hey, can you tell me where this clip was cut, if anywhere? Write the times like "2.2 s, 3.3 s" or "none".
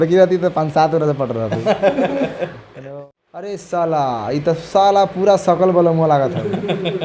2.7 s